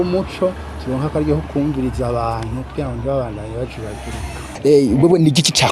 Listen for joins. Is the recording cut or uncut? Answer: cut